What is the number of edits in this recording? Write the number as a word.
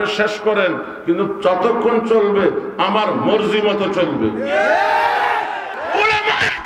one